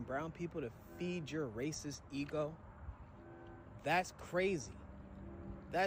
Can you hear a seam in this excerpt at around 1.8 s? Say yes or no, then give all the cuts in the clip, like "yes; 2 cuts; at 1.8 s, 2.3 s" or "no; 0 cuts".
no; 0 cuts